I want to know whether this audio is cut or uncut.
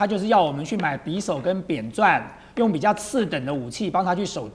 uncut